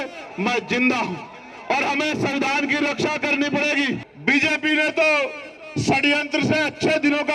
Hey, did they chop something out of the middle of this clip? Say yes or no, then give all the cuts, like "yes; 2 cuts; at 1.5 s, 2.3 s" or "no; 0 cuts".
yes; 1 cut; at 4.1 s